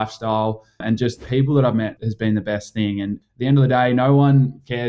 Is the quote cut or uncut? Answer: cut